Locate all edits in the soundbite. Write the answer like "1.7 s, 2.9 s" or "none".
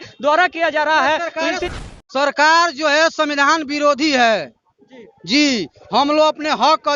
1.7 s